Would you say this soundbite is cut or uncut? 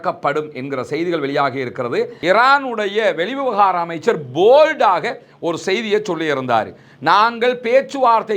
cut